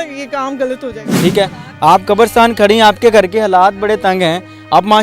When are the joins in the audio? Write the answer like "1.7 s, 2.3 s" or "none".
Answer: 1.0 s